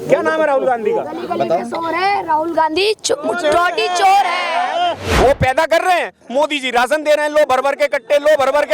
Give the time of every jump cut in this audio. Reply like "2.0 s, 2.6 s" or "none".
5.0 s